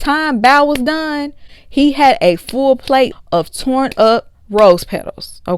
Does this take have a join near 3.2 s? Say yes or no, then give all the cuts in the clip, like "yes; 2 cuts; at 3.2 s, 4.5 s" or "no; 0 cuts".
yes; 1 cut; at 3.2 s